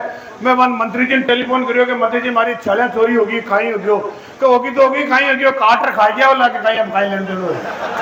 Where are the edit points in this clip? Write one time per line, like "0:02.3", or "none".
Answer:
none